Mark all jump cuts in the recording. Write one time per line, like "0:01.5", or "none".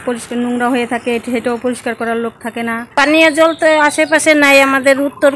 0:02.9